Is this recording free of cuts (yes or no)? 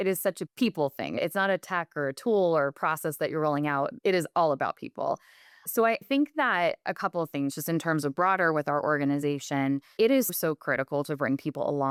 yes